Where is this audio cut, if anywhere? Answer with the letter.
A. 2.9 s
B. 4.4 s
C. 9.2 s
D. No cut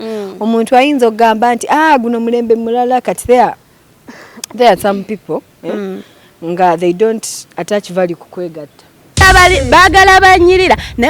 C